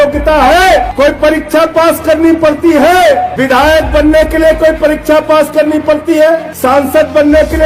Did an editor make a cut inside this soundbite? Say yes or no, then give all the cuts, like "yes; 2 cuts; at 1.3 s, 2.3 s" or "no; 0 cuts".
yes; 3 cuts; at 0.9 s, 3.3 s, 6.5 s